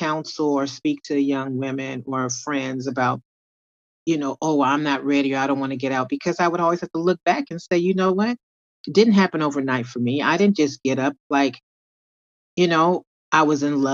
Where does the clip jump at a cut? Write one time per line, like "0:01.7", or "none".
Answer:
none